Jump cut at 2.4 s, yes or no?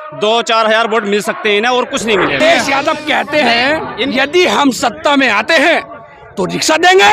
yes